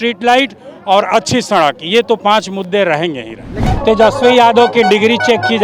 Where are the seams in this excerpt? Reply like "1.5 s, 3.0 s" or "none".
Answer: 3.6 s